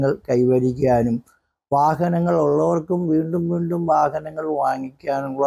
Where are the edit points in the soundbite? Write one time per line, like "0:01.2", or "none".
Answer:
none